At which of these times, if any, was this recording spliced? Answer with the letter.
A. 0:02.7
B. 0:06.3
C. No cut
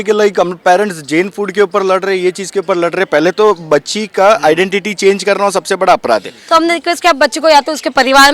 B